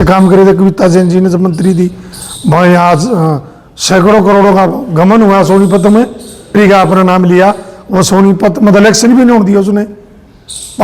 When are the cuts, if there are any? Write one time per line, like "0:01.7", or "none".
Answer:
0:06.5

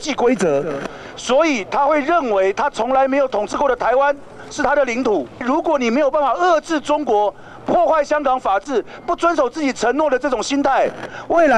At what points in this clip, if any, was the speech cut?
0:05.4

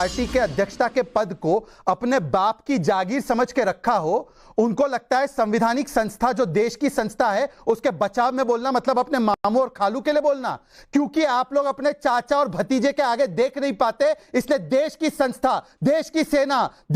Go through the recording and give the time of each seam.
none

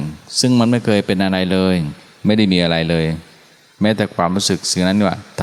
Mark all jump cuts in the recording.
none

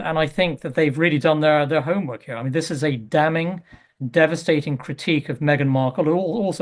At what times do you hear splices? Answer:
0:05.3

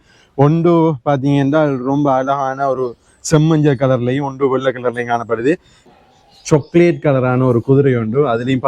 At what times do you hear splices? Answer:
0:05.9

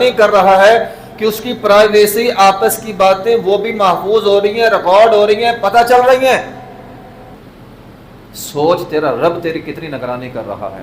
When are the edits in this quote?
0:07.4

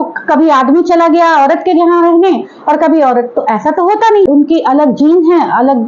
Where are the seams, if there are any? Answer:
0:04.3

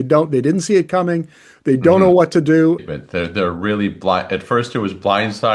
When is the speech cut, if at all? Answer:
0:02.9

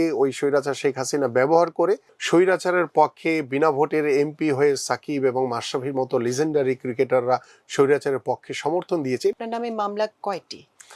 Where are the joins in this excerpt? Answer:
0:02.1
0:09.4

